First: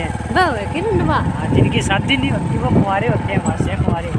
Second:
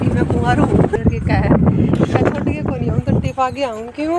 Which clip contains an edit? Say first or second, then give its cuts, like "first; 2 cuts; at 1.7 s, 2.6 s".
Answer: second; 1 cut; at 1.0 s